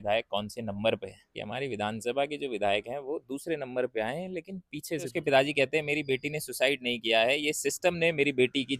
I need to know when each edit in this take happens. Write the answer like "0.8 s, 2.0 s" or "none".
1.4 s, 5.1 s